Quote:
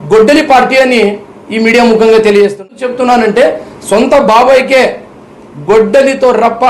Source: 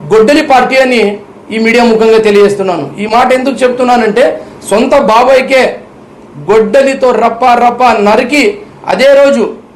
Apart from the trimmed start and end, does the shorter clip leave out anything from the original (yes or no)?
yes